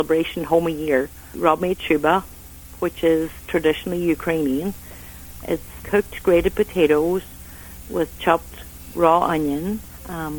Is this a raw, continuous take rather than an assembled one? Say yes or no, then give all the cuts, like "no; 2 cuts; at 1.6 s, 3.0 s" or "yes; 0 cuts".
no; 2 cuts; at 1.3 s, 5.7 s